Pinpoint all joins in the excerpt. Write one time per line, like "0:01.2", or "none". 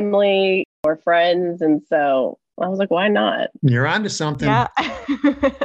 0:03.5
0:04.5